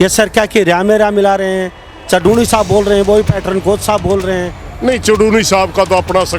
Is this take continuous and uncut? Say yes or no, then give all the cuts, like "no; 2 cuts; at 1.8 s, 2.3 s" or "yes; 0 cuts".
no; 1 cut; at 4.7 s